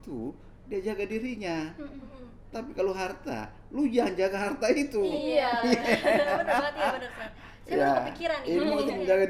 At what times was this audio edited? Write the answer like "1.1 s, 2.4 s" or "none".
none

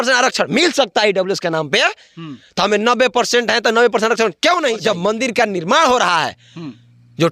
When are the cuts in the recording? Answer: 4.8 s

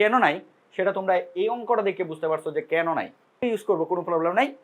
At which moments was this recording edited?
3.3 s

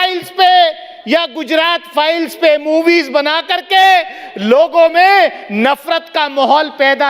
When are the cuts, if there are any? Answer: none

